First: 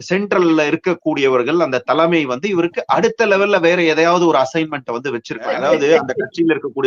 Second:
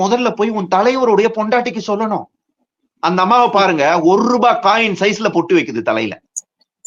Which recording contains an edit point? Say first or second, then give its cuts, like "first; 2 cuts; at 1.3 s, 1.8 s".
first; 1 cut; at 5.6 s